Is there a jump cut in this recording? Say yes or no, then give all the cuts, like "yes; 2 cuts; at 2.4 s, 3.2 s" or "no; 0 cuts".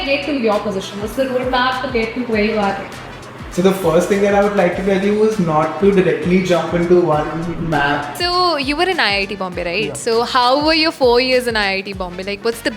yes; 1 cut; at 8.1 s